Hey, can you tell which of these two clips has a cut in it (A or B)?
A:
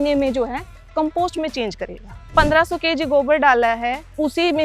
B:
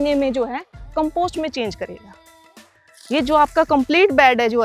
A